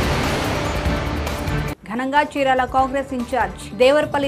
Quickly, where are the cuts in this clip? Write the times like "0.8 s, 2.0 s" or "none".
1.3 s